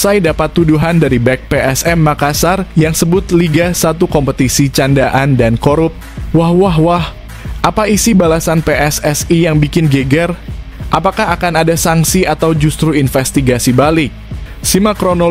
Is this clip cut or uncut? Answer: uncut